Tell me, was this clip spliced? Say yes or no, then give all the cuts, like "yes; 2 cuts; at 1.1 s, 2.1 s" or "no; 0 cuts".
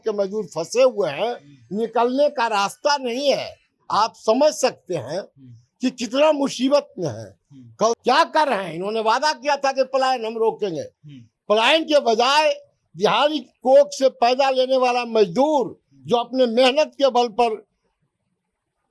yes; 1 cut; at 8.0 s